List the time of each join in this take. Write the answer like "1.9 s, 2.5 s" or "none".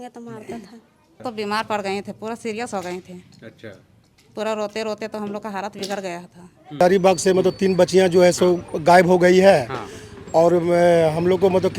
1.2 s, 6.8 s